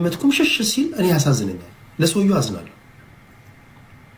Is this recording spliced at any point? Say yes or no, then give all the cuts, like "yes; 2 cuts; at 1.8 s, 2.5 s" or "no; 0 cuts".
no; 0 cuts